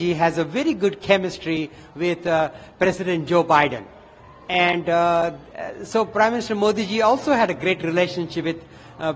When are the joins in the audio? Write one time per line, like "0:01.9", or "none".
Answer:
none